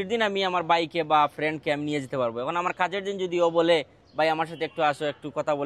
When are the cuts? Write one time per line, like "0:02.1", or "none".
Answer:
none